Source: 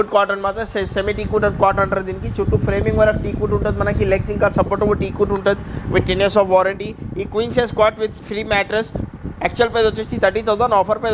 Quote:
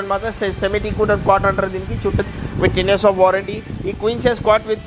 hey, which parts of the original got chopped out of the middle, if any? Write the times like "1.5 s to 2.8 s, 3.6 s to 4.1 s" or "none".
2.5 s to 5.5 s